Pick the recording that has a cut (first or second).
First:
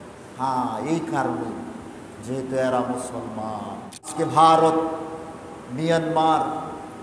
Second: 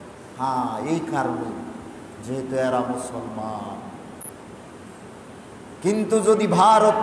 first